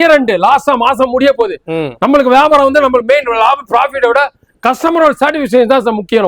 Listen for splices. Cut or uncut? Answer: uncut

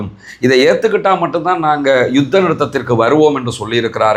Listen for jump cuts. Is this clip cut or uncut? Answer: uncut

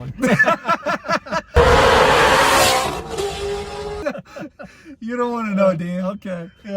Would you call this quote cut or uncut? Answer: cut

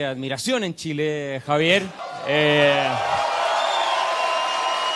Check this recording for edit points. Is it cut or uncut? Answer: cut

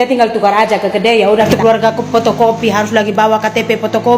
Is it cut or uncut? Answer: cut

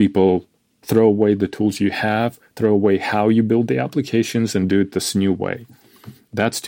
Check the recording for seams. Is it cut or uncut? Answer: uncut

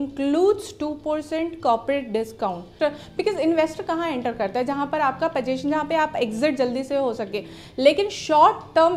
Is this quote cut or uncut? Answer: cut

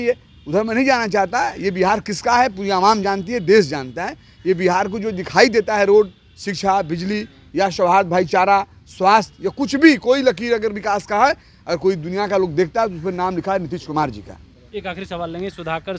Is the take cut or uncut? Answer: uncut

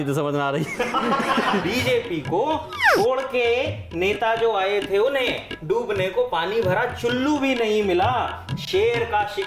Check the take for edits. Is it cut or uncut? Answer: cut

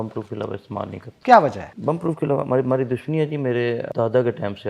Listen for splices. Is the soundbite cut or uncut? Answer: cut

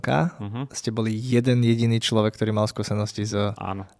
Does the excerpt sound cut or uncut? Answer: uncut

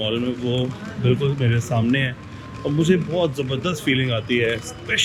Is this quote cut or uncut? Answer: uncut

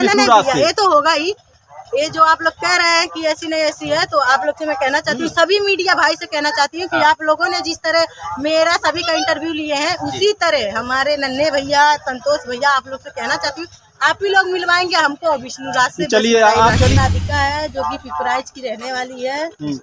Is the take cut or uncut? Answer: cut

